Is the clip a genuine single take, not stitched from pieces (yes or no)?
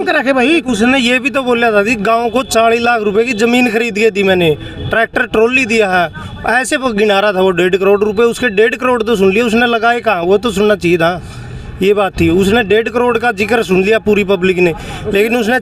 yes